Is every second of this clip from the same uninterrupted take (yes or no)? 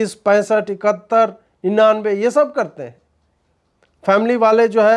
yes